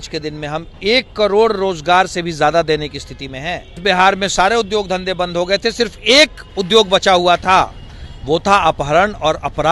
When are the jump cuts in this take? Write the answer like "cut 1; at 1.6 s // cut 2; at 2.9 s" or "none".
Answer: cut 1; at 3.8 s

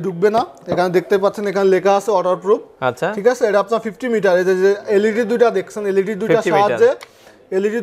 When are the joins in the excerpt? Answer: none

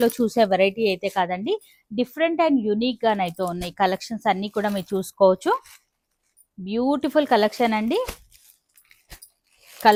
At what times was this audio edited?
none

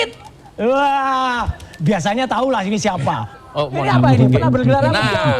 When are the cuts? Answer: cut 1; at 3.4 s

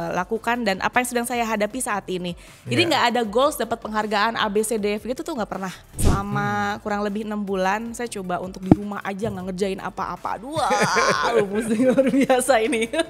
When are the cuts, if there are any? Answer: cut 1; at 6.0 s

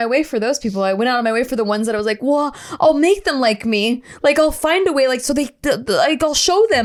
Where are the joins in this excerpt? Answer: none

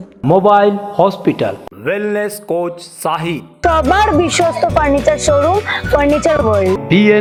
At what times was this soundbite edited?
none

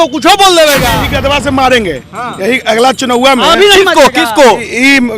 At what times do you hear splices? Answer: cut 1; at 1.0 s

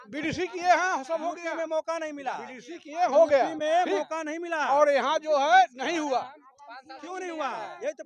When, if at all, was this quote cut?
none

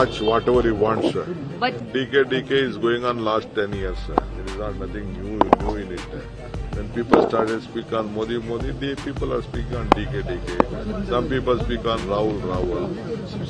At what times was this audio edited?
cut 1; at 1.8 s

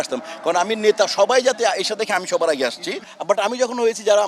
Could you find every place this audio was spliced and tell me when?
cut 1; at 3.1 s

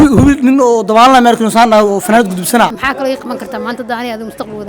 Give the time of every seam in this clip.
cut 1; at 2.8 s

